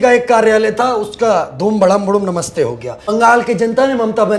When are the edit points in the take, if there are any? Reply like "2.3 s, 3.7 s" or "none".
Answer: 2.9 s